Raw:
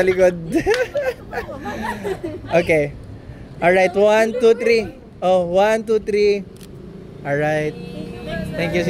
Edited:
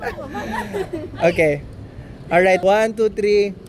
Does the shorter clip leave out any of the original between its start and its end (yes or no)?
yes